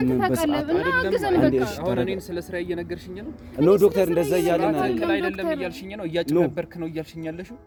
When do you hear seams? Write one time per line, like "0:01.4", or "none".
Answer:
none

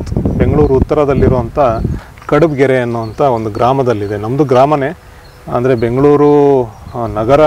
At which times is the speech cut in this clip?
none

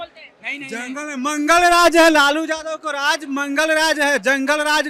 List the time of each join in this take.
none

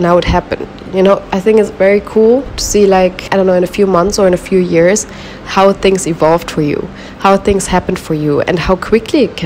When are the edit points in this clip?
none

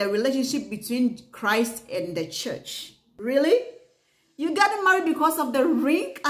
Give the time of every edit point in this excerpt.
0:03.0

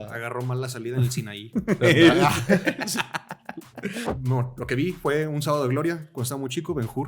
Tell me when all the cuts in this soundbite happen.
0:04.1

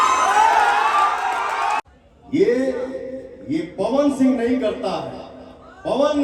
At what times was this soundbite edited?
0:01.8

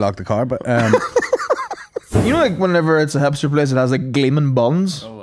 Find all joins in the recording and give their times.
0:02.2

